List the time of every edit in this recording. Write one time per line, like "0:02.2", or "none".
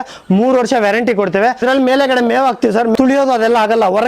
0:01.6
0:02.9